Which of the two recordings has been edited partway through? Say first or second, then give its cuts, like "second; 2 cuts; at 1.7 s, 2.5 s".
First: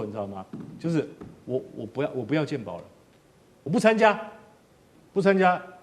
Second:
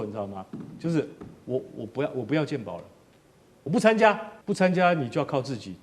second; 1 cut; at 4.3 s